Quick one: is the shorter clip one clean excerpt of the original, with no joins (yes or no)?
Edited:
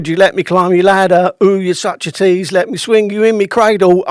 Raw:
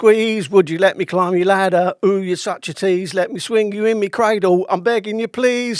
yes